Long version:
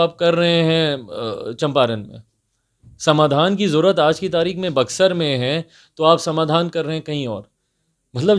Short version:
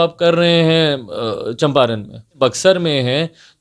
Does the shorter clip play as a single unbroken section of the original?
no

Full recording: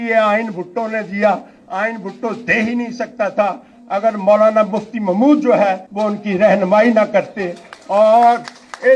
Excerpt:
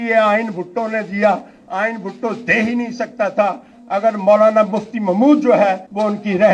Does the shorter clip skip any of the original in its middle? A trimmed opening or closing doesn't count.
no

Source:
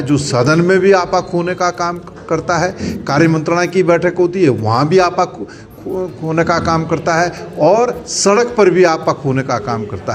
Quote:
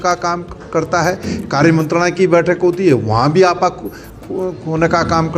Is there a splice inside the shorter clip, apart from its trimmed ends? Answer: no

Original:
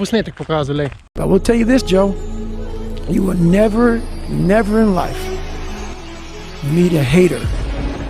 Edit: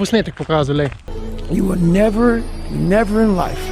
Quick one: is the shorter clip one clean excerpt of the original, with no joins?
no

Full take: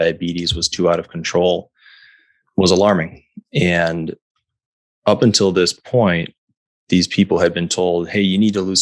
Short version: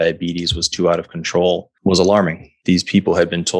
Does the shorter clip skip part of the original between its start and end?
yes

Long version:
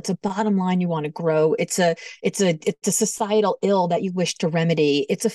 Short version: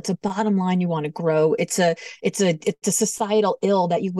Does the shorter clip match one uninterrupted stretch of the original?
yes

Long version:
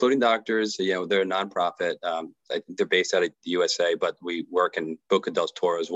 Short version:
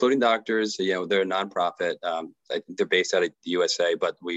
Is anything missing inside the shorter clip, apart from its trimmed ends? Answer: no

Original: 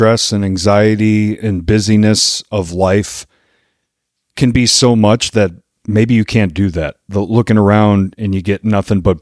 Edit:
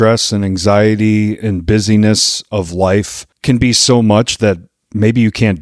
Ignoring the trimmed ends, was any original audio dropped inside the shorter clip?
yes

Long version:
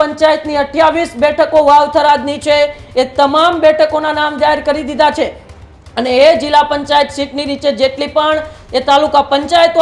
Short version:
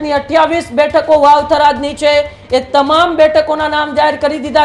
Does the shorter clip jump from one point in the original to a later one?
no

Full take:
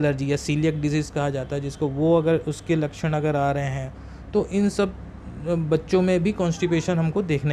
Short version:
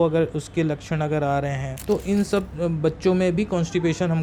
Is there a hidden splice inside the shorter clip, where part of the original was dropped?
yes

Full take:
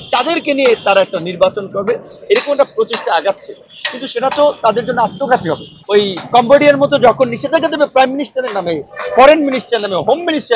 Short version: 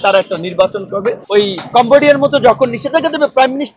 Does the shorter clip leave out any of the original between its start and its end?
yes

